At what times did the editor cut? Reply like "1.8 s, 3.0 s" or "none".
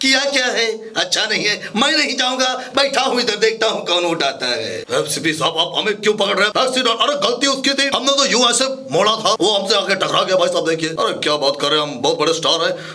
4.9 s